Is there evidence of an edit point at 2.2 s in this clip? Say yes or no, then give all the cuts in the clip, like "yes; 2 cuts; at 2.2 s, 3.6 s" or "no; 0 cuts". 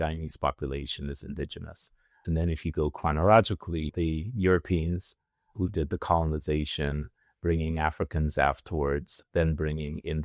yes; 1 cut; at 2.2 s